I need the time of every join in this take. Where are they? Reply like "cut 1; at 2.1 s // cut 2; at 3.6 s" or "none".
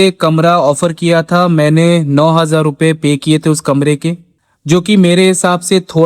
none